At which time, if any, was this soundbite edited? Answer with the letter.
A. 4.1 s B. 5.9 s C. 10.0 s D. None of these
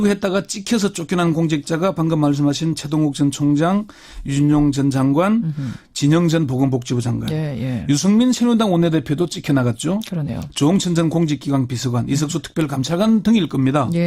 D